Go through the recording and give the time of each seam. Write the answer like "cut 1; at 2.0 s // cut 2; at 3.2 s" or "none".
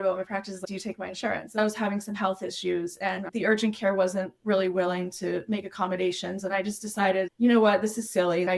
cut 1; at 1.6 s